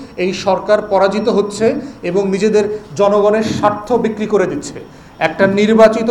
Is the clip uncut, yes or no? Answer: yes